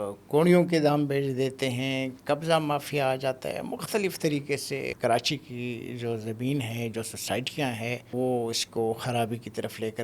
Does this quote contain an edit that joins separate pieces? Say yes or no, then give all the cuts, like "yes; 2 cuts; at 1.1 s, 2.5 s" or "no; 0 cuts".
yes; 2 cuts; at 4.9 s, 8.1 s